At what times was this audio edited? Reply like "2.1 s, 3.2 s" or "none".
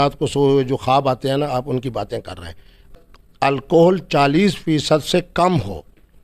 2.9 s